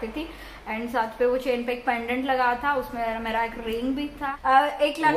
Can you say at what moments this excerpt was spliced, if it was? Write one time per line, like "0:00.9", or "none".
0:04.3